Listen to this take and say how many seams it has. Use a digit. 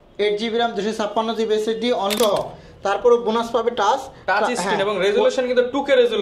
1